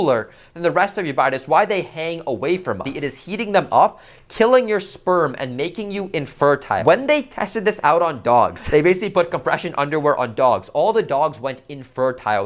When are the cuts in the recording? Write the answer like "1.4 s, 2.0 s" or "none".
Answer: 2.9 s, 6.8 s